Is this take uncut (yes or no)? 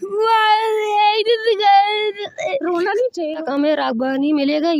no